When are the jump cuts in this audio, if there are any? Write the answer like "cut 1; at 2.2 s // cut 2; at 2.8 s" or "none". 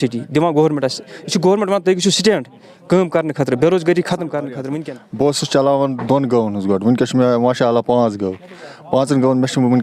cut 1; at 4.6 s